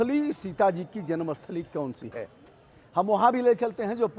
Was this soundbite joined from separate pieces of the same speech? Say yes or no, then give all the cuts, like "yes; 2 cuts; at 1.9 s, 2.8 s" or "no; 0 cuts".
no; 0 cuts